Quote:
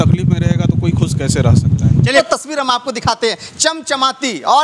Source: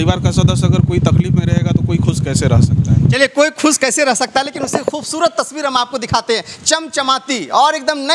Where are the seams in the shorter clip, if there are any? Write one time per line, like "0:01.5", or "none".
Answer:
0:02.2